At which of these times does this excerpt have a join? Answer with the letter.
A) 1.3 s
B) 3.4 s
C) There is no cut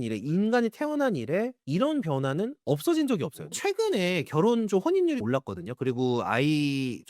B